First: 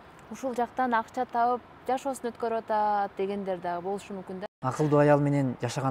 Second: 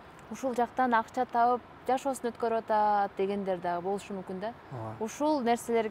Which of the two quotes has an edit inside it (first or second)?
first